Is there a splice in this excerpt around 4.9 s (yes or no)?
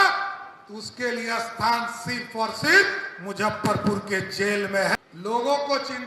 yes